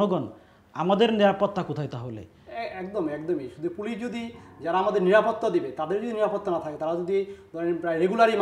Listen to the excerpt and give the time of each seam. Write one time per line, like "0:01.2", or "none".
none